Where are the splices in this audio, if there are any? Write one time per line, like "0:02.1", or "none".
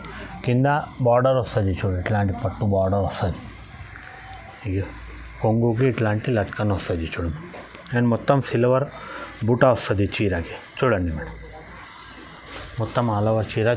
none